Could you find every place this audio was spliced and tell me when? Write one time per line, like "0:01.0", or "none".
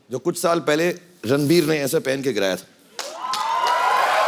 none

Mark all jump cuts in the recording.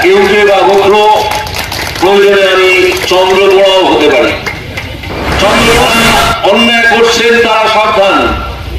0:05.9

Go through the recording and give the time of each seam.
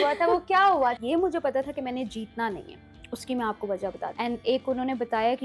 0:01.0
0:04.1

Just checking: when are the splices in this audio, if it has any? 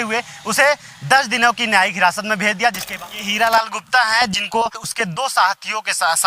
0:02.9
0:04.8

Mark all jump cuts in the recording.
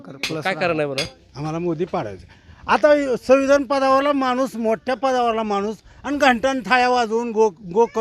0:01.2

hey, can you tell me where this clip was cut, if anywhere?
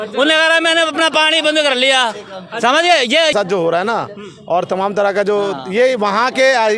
0:03.3

